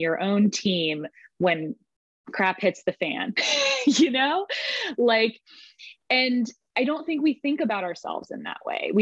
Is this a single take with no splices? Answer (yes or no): yes